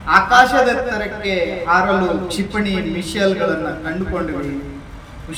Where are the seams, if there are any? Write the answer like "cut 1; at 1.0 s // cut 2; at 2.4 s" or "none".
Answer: none